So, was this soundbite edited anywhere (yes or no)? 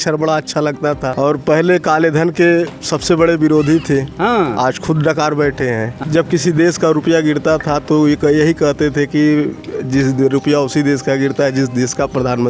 yes